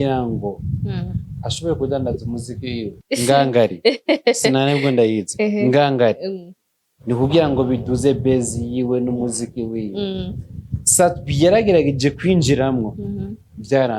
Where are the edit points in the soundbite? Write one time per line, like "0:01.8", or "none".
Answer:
0:03.0